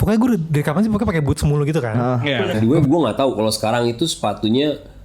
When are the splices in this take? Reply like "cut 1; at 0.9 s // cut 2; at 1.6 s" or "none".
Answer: cut 1; at 2.6 s